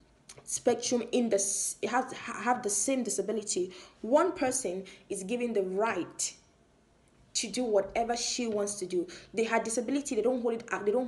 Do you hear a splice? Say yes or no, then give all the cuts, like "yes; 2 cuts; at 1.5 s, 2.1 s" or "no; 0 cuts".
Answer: no; 0 cuts